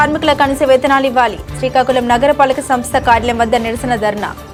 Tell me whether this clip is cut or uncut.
uncut